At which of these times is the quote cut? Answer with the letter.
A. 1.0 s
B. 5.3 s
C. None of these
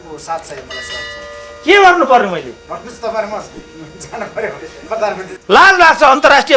B